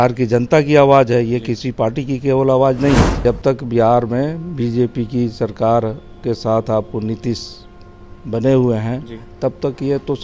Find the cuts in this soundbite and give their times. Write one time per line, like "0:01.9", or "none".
0:03.1